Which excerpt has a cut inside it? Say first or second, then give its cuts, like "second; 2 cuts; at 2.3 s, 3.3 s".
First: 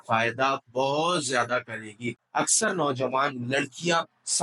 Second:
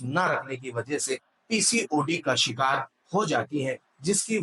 first; 1 cut; at 2.2 s